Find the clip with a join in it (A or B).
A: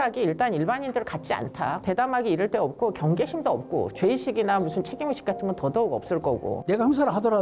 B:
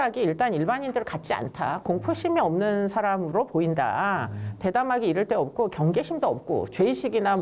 A